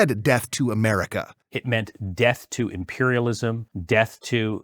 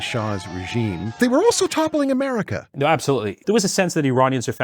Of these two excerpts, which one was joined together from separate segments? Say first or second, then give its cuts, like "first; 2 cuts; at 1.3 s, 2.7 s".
first; 1 cut; at 1.4 s